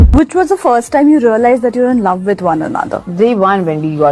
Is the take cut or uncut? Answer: uncut